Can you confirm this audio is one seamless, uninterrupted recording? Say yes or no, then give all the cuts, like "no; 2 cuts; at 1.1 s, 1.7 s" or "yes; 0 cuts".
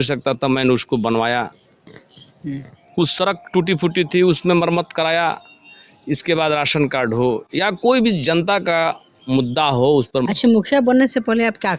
no; 1 cut; at 10.3 s